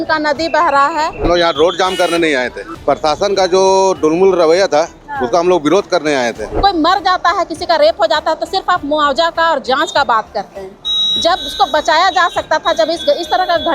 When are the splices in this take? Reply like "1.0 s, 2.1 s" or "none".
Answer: 1.2 s, 6.5 s